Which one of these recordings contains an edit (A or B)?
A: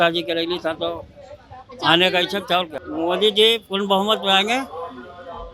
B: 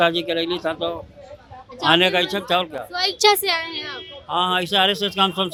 A